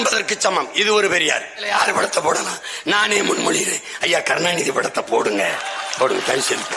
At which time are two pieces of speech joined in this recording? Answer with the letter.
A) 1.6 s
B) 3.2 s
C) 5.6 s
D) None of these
A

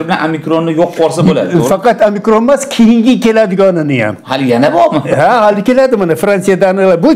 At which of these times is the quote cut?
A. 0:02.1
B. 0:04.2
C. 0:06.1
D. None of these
D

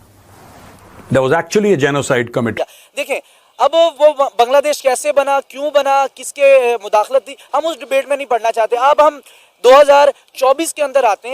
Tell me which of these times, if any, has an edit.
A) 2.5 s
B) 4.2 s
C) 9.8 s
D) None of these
A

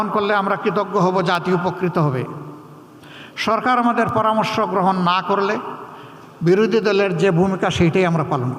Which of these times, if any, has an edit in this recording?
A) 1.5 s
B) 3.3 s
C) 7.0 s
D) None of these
D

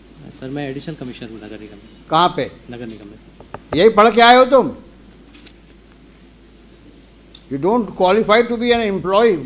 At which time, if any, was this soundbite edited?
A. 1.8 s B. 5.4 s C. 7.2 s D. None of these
D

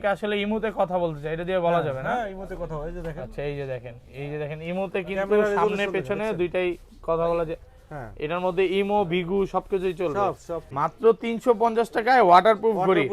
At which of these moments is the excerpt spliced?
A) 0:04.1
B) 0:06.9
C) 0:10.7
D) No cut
C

